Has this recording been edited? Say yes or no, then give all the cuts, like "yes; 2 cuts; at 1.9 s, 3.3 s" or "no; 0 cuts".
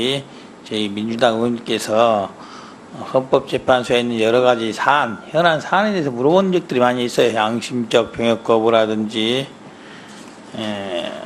yes; 1 cut; at 4.0 s